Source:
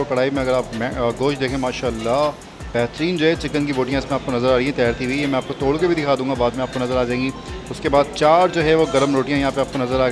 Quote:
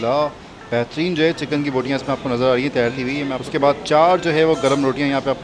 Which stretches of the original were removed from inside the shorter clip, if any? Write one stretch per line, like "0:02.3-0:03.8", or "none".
0:05.4-0:07.7